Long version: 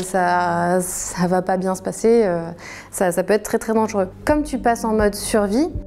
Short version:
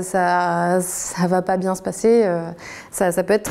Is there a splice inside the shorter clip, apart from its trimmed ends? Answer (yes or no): no